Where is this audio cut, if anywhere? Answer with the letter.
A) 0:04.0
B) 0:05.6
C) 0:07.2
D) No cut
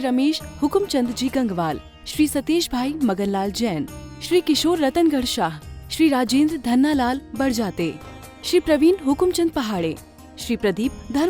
D